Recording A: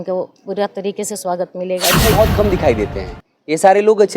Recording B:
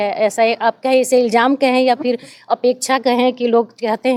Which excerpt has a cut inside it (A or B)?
A